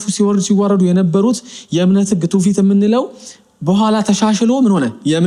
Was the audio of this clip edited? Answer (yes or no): no